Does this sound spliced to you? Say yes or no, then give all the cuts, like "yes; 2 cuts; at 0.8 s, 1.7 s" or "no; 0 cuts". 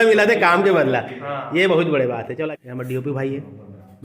yes; 1 cut; at 2.4 s